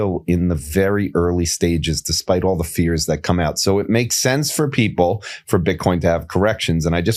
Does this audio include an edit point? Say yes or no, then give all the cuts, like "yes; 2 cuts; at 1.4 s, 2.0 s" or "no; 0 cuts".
no; 0 cuts